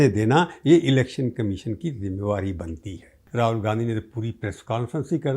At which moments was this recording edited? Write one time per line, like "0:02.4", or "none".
0:03.2